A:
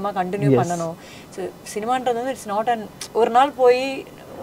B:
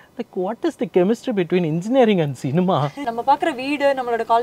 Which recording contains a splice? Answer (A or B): B